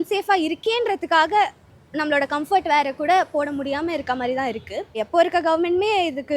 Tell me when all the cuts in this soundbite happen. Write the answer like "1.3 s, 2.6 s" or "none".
5.0 s

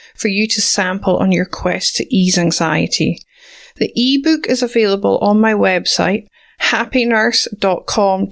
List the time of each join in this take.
none

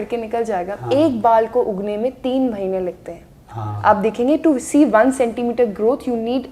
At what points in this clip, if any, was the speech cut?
none

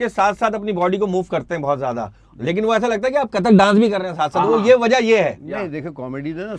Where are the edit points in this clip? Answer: none

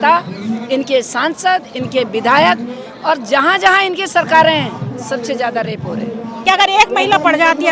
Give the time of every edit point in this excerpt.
6.3 s

